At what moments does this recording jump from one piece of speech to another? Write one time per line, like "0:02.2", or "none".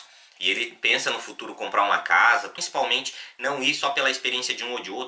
0:02.6